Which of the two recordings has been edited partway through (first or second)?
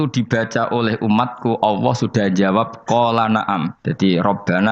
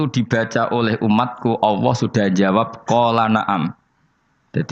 first